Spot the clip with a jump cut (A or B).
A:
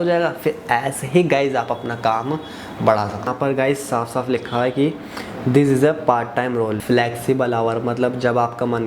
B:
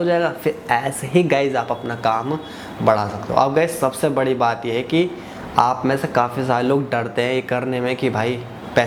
A